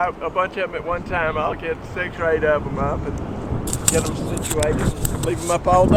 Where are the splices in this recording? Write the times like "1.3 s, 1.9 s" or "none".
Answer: none